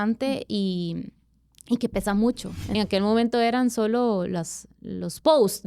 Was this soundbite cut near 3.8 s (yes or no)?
no